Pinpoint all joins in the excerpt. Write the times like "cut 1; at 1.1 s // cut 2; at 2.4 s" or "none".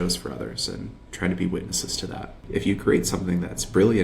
cut 1; at 2.4 s